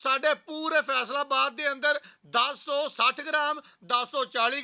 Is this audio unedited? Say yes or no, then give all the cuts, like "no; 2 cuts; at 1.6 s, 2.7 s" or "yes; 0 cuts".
yes; 0 cuts